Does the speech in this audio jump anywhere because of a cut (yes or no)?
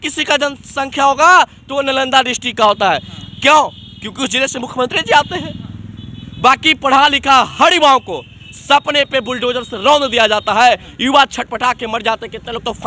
no